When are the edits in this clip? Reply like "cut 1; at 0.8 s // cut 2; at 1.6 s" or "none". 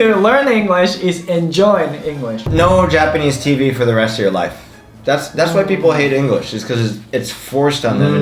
cut 1; at 2.5 s // cut 2; at 4.9 s

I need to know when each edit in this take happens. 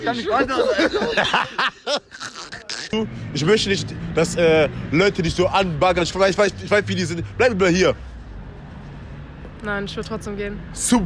cut 1; at 2.8 s

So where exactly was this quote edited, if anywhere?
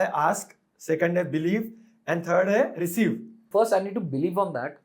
cut 1; at 3.4 s

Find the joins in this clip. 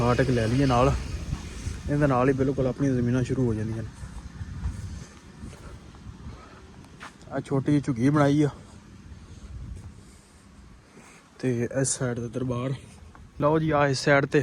cut 1; at 13.4 s

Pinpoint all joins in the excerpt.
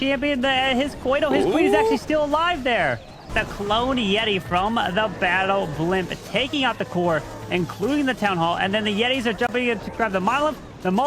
cut 1; at 3.3 s

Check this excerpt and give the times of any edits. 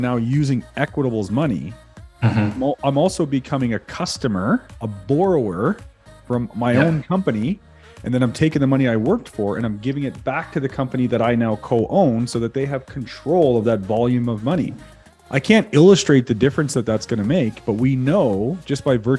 none

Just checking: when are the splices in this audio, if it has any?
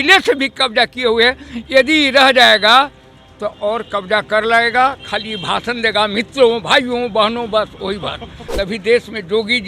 cut 1; at 8.4 s

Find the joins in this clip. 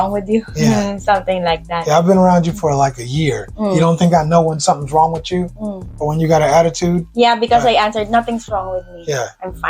none

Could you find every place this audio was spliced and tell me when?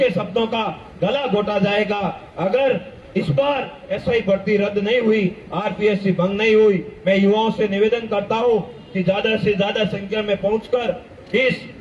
none

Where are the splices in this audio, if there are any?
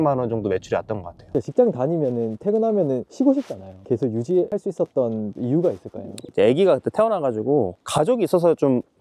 cut 1; at 1.3 s // cut 2; at 3.1 s // cut 3; at 4.5 s

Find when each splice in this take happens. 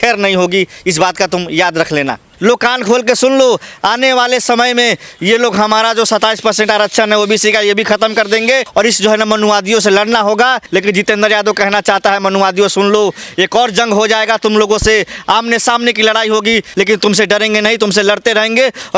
cut 1; at 2.2 s // cut 2; at 8.7 s // cut 3; at 10.6 s // cut 4; at 16.7 s

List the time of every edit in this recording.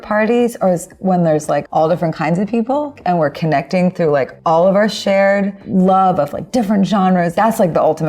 cut 1; at 1.7 s // cut 2; at 2.9 s // cut 3; at 4.3 s // cut 4; at 7.4 s

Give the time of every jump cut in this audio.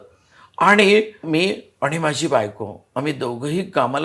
cut 1; at 1.2 s

